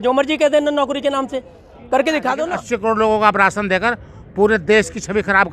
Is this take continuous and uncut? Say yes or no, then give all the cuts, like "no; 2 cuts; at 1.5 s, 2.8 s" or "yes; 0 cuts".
no; 1 cut; at 2.5 s